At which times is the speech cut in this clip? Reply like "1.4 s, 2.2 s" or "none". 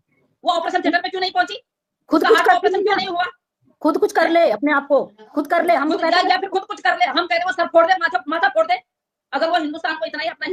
none